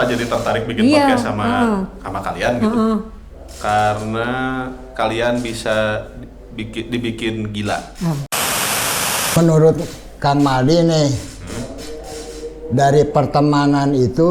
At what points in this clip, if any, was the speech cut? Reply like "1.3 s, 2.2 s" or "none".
8.8 s